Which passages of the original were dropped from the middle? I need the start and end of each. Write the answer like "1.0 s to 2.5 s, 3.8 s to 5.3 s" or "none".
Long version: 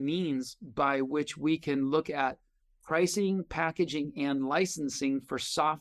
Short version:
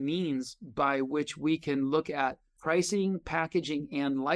2.5 s to 2.7 s